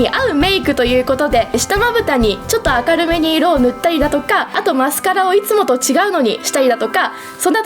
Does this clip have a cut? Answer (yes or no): yes